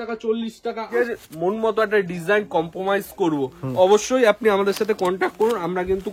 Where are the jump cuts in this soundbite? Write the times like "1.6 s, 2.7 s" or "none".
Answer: 1.0 s